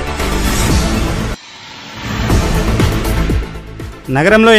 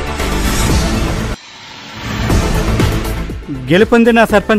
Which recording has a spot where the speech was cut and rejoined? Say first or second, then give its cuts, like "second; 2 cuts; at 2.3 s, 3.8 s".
first; 1 cut; at 3.1 s